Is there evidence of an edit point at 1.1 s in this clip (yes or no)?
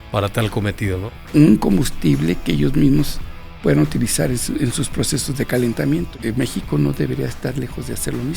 yes